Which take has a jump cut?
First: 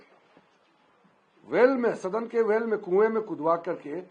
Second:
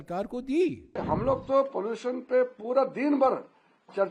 second; 1 cut; at 0.9 s

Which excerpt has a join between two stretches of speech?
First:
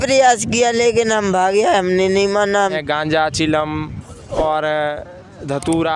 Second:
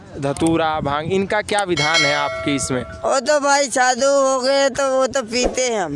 first; 1 cut; at 2.8 s

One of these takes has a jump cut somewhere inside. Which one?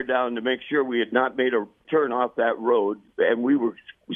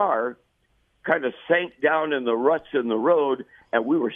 first; 2 cuts; at 1.8 s, 3.0 s

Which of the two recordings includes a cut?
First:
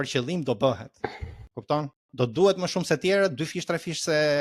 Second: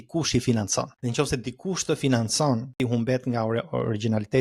second; 2 cuts; at 0.9 s, 2.7 s

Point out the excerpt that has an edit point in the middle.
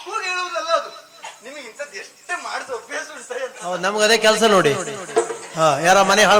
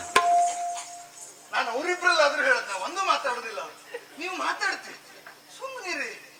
first; 1 cut; at 1.4 s

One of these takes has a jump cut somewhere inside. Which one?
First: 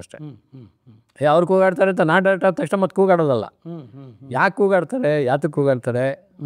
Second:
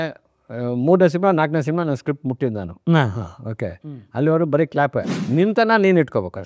second; 1 cut; at 5.2 s

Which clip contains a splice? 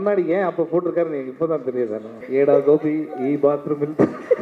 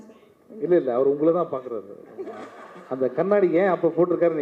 first; 1 cut; at 2.2 s

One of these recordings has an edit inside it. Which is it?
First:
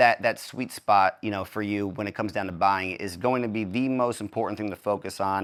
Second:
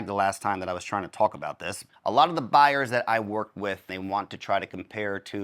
second; 2 cuts; at 1.8 s, 3.9 s

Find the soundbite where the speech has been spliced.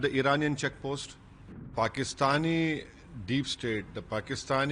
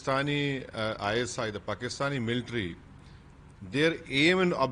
first; 1 cut; at 1.7 s

